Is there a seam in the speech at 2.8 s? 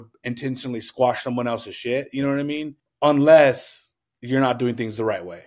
yes; 1 cut; at 2.8 s

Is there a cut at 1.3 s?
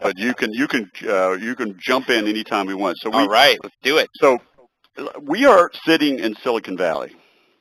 yes; 1 cut; at 1.3 s

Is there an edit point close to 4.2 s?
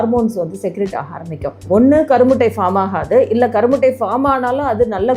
no; 1 cut; at 1.6 s

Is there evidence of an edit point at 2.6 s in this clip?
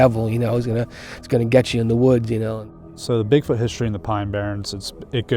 yes; 1 cut; at 2.6 s

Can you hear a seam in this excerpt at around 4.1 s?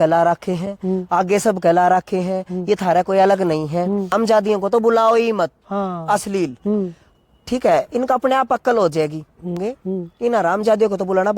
yes; 2 cuts; at 4.1 s, 9.7 s

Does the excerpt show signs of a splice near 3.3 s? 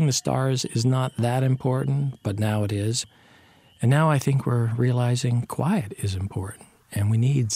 yes; 2 cuts; at 2.2 s, 3.3 s

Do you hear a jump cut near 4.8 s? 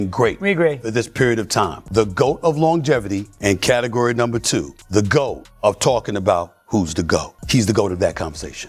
yes; 5 cuts; at 1.8 s, 3.2 s, 4.8 s, 5.5 s, 7.4 s

